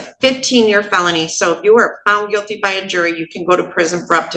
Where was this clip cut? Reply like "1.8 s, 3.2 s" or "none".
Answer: none

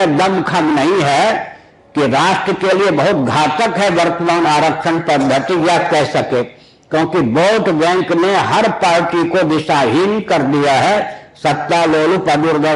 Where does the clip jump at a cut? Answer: none

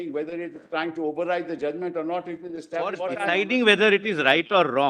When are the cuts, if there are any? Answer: 3.2 s

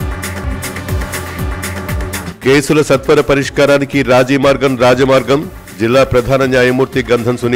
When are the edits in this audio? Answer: 2.2 s

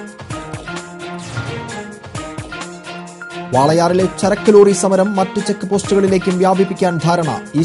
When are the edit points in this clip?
1.2 s

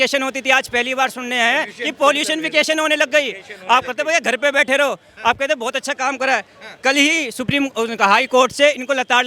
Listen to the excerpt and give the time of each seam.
none

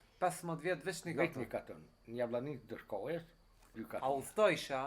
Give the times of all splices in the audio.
3.8 s

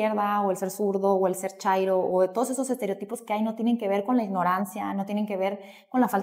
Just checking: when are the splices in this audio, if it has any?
none

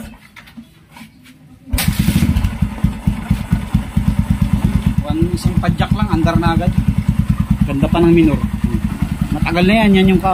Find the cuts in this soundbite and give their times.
8.9 s

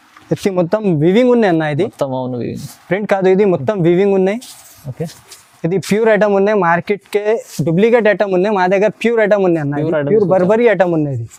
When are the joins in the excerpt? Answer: none

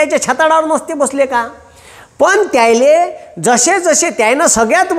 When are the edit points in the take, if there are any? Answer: none

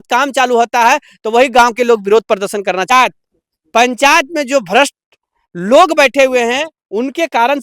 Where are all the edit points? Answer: 2.9 s

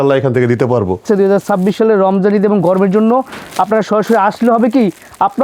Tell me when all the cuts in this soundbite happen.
1.0 s

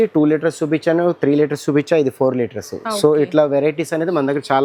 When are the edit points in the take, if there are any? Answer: none

